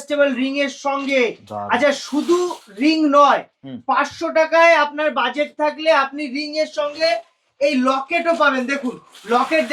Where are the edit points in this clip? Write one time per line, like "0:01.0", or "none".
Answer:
none